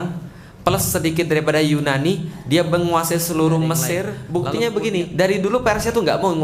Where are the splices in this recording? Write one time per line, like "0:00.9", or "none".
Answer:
0:04.2